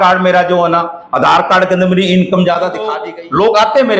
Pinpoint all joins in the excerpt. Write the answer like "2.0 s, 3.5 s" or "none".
3.0 s